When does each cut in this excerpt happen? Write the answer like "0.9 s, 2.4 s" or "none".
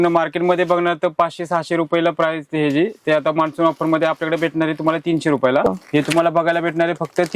5.6 s